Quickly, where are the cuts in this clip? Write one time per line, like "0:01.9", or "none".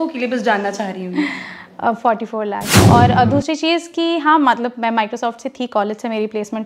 0:02.7